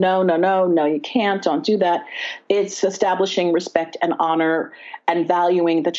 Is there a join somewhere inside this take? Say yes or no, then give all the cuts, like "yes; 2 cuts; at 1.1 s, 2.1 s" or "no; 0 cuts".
no; 0 cuts